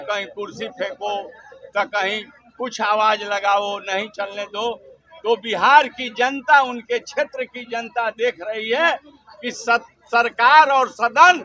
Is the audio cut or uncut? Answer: uncut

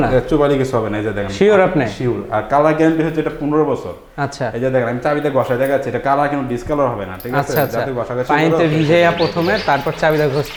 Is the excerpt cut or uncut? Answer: uncut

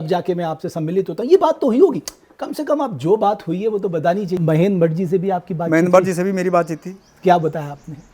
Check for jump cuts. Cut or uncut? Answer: cut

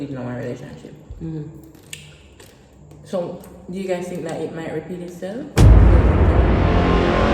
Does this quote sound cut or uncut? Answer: uncut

